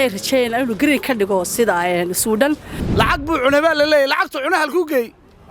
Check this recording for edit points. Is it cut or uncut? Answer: cut